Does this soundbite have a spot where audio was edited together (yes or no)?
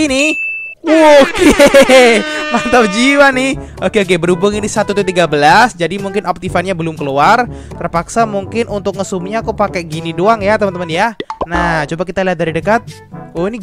no